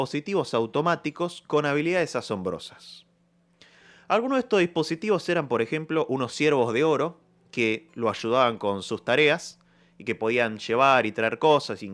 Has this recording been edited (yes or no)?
no